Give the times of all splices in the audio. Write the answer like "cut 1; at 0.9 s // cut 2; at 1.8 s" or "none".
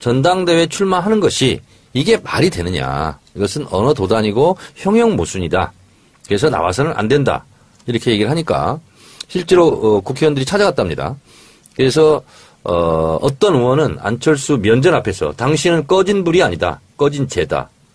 none